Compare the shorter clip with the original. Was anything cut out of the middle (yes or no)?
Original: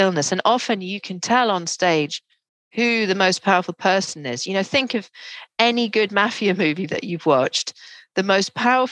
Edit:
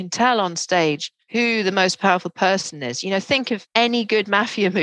yes